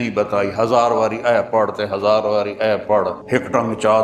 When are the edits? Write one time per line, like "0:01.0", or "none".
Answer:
none